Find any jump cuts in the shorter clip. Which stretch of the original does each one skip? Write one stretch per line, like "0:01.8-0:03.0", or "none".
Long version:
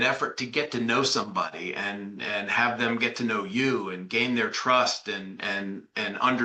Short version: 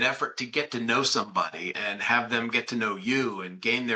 0:01.7-0:02.2